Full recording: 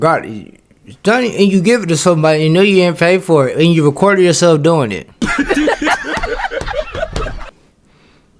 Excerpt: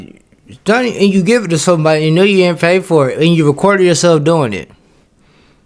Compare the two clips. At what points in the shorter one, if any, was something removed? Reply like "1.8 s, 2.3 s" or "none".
4.7 s